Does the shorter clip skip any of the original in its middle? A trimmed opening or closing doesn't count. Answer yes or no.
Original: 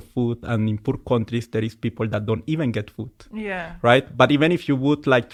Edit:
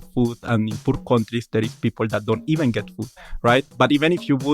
yes